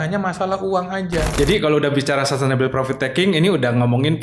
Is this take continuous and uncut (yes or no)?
no